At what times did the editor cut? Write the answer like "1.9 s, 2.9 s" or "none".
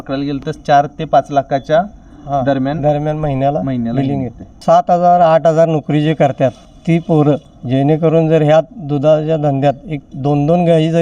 4.6 s, 6.7 s, 7.5 s